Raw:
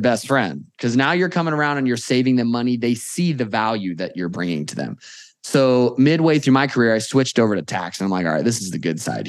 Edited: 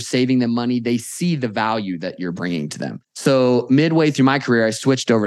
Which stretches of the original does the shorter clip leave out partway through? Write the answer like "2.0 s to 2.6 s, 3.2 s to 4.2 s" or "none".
5.0 s to 5.3 s

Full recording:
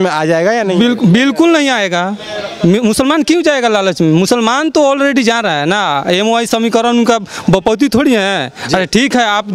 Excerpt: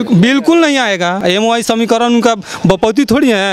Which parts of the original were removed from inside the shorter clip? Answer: 2.1 s to 6.0 s

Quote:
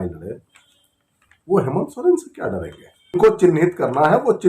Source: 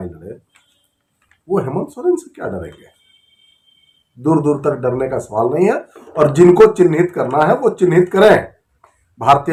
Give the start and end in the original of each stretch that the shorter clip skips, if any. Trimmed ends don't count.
3.2 s to 6.5 s

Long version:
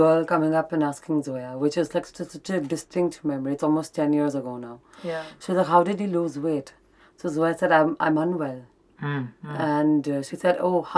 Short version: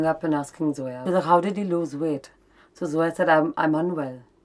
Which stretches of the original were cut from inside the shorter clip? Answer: 1.4 s to 5.3 s

